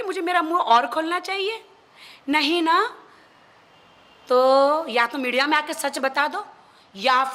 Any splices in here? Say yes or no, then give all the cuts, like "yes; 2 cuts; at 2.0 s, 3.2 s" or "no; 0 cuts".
no; 0 cuts